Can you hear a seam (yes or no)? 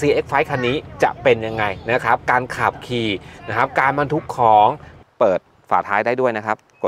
yes